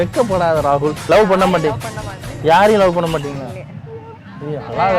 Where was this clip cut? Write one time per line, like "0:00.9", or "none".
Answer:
0:01.0